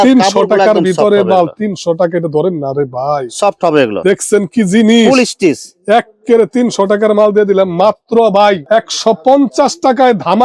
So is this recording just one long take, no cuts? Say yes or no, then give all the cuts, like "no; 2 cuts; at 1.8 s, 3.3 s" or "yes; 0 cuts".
yes; 0 cuts